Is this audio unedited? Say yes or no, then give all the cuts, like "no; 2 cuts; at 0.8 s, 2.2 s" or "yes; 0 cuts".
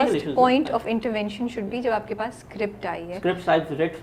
yes; 0 cuts